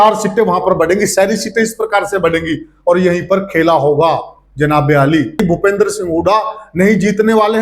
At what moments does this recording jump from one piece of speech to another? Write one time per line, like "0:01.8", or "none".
0:05.4